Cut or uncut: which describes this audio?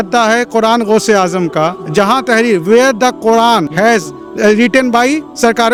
uncut